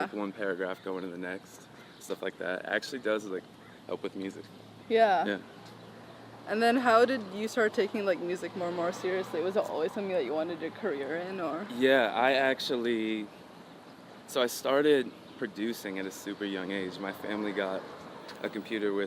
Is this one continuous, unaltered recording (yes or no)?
yes